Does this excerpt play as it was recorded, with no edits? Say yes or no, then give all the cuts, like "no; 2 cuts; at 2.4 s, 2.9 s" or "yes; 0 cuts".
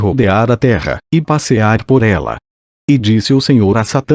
yes; 0 cuts